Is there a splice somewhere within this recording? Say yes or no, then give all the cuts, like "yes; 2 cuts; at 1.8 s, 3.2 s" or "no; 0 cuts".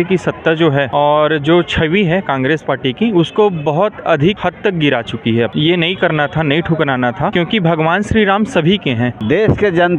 yes; 5 cuts; at 0.9 s, 4.4 s, 5.5 s, 7.3 s, 9.2 s